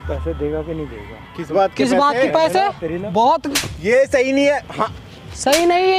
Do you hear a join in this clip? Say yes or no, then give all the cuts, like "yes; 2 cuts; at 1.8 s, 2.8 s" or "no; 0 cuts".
yes; 1 cut; at 2.8 s